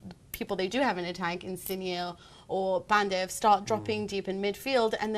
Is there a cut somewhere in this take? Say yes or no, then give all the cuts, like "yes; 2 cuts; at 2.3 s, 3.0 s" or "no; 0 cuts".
yes; 1 cut; at 3.2 s